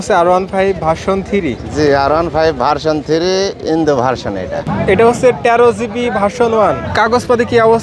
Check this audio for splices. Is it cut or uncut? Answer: cut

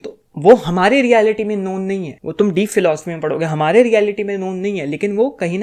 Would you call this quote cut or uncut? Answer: cut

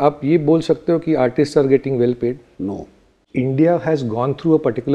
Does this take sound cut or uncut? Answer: cut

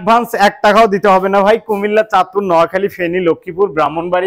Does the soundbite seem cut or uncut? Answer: uncut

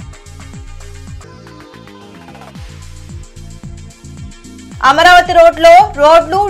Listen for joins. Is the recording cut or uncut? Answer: cut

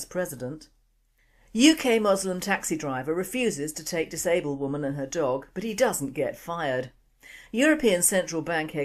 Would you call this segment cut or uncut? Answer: cut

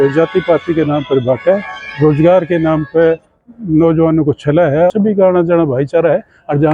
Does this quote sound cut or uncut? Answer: cut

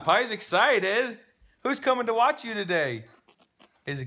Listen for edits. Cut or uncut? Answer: uncut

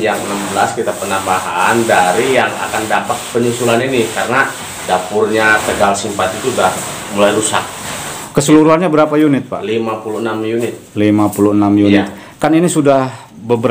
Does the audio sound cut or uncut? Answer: uncut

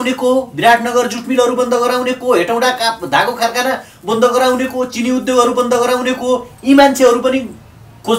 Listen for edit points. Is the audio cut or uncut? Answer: uncut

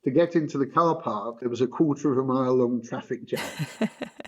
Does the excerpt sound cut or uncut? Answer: cut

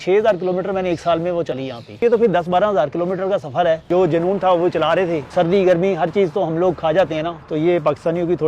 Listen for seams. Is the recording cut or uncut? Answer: cut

